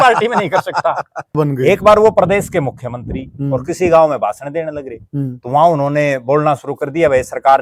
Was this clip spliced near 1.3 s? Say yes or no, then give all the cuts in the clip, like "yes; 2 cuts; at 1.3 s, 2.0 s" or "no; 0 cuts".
yes; 1 cut; at 1.3 s